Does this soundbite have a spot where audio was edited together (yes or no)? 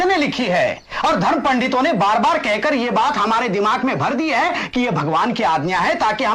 no